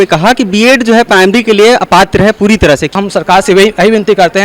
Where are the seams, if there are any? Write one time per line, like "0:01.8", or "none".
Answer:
0:02.9